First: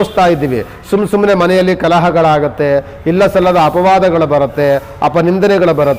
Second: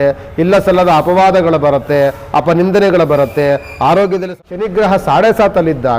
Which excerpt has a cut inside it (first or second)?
second